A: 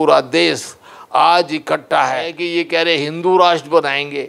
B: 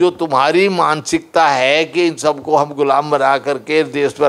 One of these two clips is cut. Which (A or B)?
A